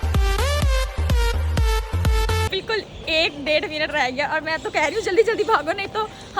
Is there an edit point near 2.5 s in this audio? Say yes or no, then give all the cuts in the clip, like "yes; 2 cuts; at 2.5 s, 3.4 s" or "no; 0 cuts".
yes; 1 cut; at 2.5 s